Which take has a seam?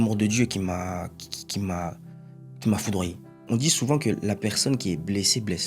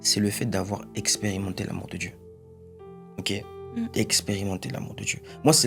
first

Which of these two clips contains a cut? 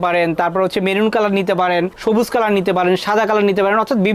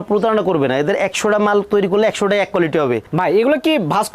second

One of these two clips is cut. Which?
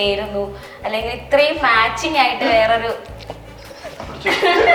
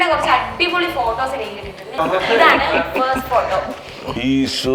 second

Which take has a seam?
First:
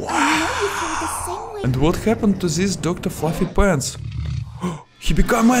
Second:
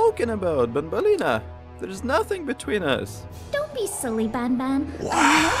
first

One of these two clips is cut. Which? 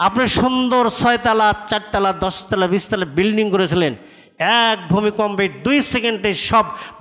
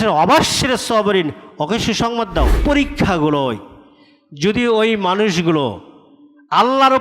second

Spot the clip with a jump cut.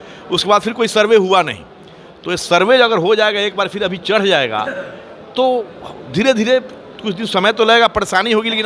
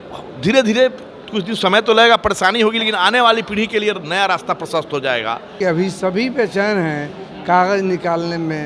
second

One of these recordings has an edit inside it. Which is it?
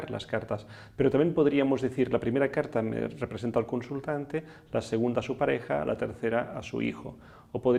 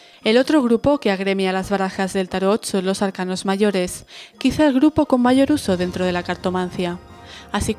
second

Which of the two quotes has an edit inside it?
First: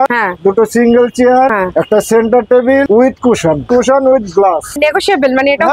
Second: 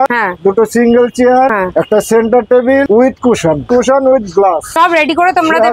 first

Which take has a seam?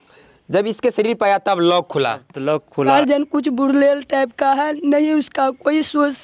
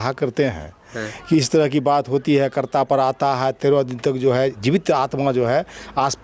first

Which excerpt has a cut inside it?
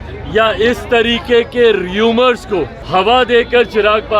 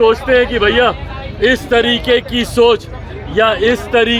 first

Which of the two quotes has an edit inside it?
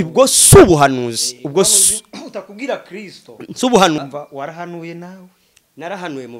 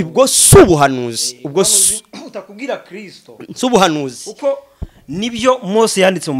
first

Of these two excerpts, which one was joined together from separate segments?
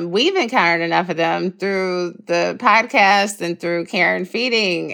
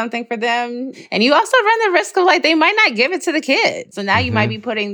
second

